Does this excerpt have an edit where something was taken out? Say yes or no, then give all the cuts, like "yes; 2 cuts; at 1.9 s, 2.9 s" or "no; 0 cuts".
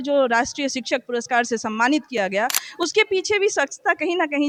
no; 0 cuts